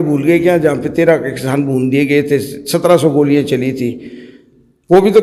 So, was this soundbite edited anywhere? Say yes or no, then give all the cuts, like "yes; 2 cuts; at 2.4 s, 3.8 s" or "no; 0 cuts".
no; 0 cuts